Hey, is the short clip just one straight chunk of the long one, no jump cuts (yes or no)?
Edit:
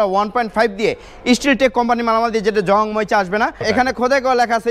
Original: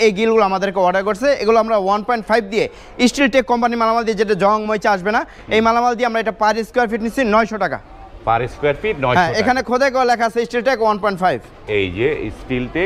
no